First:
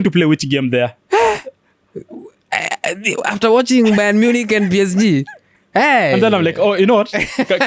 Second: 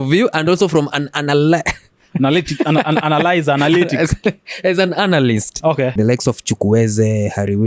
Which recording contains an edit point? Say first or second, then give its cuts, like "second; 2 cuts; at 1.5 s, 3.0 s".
second; 1 cut; at 6.0 s